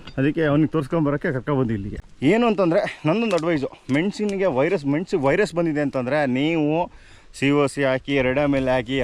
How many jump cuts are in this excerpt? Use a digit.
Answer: 1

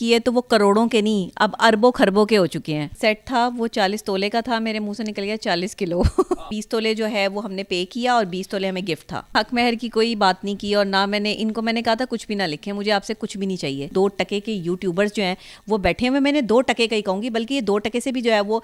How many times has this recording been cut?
4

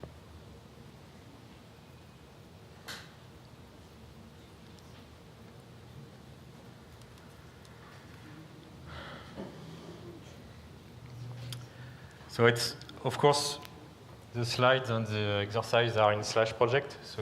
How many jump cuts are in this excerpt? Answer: 1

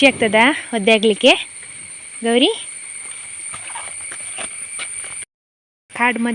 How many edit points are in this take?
0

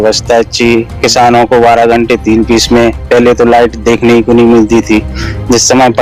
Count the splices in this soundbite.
0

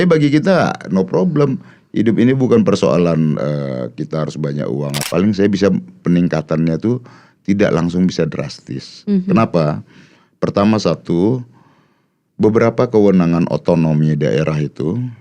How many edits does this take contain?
1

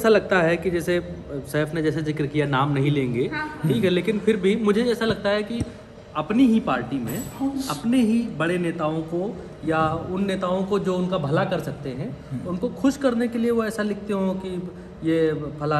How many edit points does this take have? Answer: 0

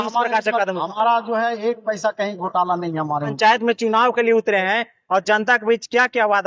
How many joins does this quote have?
1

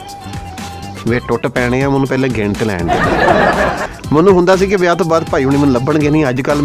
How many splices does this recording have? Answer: 1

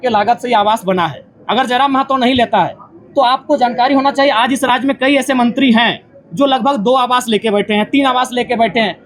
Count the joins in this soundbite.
0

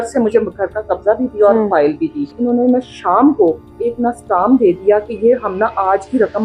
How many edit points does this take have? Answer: 2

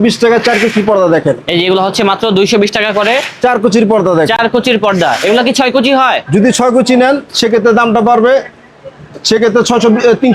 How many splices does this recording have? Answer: 0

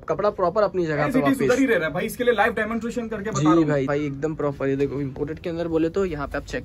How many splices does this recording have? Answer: 1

